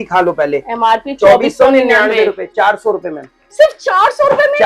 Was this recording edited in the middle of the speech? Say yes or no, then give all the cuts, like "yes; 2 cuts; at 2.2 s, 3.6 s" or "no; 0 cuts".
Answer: no; 0 cuts